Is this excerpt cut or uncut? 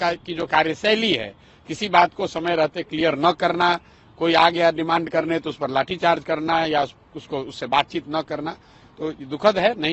uncut